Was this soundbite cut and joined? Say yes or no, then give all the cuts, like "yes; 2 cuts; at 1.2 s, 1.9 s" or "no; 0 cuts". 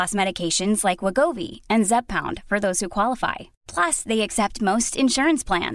no; 0 cuts